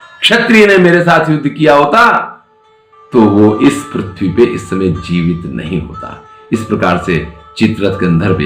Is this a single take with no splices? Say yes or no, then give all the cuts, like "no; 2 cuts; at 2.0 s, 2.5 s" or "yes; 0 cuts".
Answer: yes; 0 cuts